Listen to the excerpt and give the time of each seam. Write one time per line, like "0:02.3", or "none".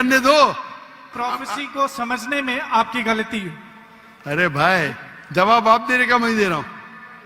0:01.1